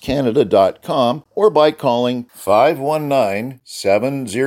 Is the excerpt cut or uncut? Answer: cut